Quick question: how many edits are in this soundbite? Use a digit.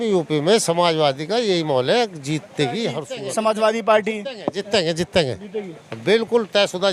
1